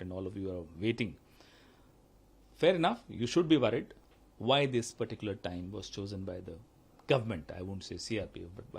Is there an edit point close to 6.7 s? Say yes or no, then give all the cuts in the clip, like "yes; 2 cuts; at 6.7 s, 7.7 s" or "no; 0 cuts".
no; 1 cut; at 4.0 s